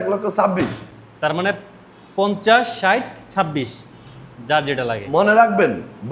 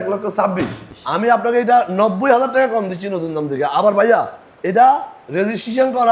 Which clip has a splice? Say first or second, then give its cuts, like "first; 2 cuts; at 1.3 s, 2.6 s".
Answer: second; 1 cut; at 0.9 s